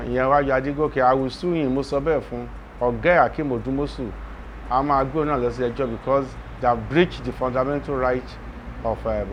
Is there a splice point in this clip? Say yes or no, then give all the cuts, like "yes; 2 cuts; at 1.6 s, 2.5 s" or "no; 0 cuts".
no; 0 cuts